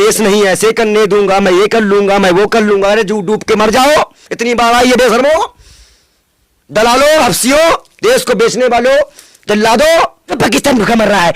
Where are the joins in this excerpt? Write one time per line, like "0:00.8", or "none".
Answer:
0:10.3